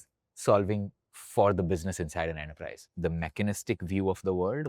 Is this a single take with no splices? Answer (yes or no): no